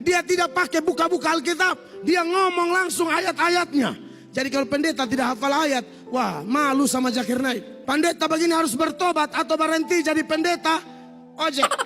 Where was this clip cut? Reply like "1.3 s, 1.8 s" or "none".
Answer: 7.7 s